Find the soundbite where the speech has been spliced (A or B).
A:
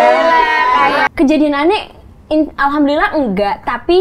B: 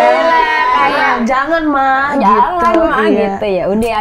A